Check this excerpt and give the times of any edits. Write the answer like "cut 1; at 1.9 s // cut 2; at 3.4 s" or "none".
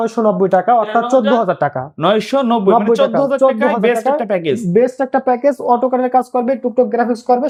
none